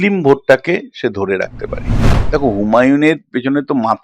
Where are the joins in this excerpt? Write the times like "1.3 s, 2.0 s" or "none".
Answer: 2.2 s